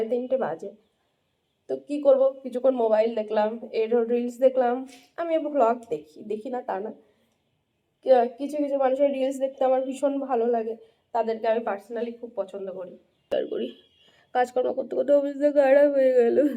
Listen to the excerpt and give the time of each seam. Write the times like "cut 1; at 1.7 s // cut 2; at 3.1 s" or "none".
cut 1; at 13.3 s